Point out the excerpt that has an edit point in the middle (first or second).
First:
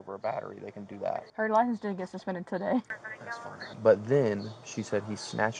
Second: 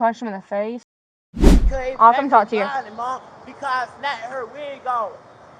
second